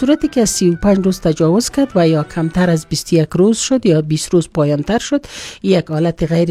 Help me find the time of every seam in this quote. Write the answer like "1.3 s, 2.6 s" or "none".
none